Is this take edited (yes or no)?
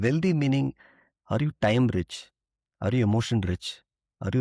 no